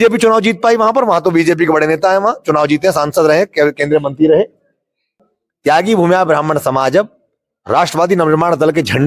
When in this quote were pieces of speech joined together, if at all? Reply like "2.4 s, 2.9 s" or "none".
5.1 s